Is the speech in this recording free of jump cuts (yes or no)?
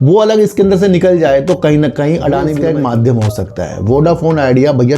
no